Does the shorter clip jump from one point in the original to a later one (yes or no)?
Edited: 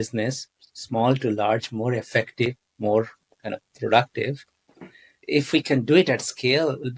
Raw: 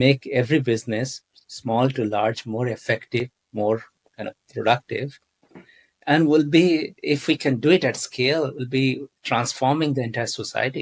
yes